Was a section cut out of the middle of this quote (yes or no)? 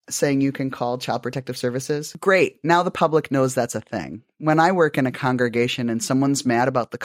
yes